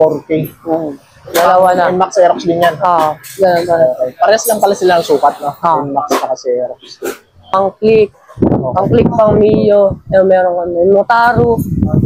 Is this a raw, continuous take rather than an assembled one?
no; 1 cut; at 7.5 s

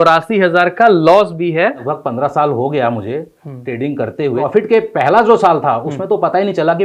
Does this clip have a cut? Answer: yes; 2 cuts; at 1.9 s, 4.4 s

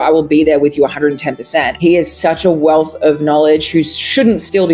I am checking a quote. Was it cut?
yes; 1 cut; at 1.8 s

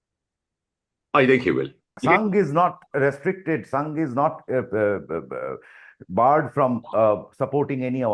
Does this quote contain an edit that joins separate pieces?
yes; 1 cut; at 1.9 s

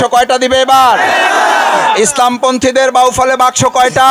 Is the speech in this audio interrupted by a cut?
no; 0 cuts

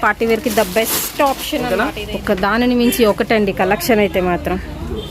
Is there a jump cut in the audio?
yes; 1 cut; at 1.6 s

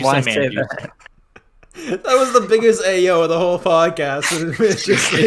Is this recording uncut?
yes; 0 cuts

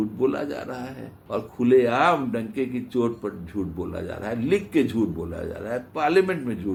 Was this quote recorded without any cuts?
yes; 0 cuts

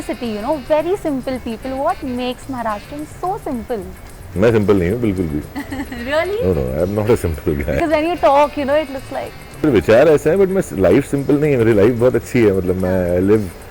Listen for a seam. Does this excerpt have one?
no; 0 cuts

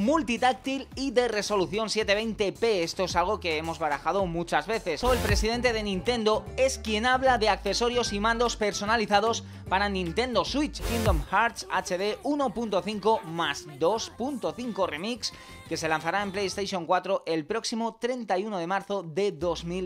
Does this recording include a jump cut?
yes; 2 cuts; at 5.0 s, 10.9 s

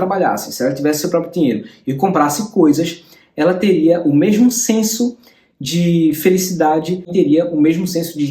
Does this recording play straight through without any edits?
yes; 0 cuts

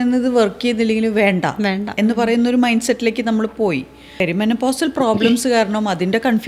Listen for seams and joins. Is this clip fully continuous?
no; 1 cut; at 4.1 s

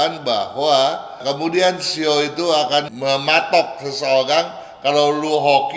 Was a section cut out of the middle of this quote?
yes; 2 cuts; at 1.1 s, 2.9 s

